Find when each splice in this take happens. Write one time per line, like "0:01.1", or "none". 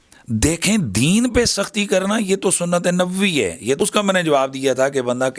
0:03.8